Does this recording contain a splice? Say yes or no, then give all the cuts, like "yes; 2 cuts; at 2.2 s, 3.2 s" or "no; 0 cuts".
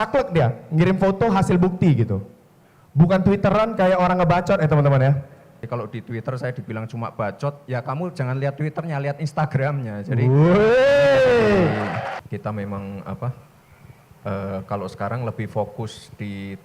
yes; 2 cuts; at 5.6 s, 12.1 s